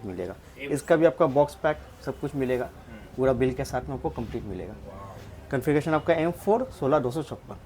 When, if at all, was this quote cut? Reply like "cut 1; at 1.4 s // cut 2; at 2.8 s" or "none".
none